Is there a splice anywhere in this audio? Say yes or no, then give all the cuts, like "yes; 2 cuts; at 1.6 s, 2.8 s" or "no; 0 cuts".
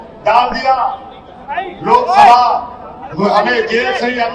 no; 0 cuts